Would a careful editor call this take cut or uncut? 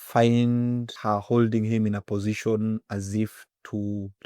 cut